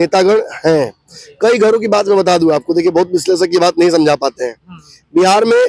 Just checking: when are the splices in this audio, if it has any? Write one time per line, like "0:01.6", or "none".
none